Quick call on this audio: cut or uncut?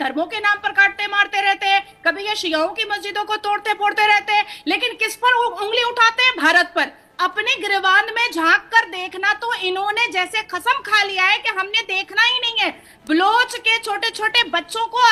uncut